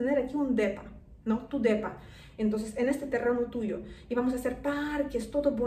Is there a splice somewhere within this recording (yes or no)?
no